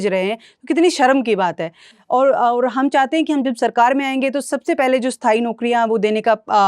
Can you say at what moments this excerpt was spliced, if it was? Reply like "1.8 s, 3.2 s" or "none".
none